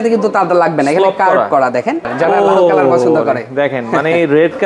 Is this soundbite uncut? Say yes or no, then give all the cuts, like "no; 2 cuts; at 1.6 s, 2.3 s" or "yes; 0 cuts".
no; 1 cut; at 2.1 s